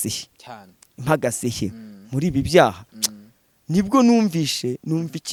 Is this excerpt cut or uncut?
uncut